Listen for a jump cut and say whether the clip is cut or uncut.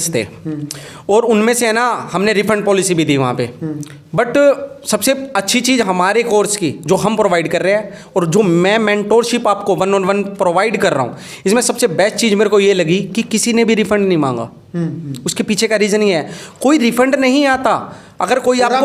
uncut